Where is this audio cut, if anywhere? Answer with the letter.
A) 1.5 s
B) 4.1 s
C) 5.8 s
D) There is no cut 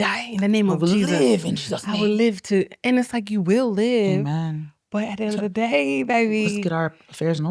D